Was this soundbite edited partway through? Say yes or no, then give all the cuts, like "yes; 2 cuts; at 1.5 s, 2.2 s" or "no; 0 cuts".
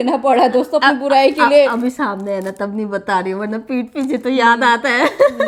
no; 0 cuts